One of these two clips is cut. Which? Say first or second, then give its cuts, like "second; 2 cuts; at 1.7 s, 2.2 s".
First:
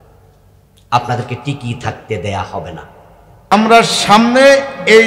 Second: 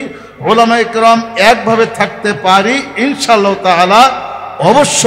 first; 1 cut; at 3.5 s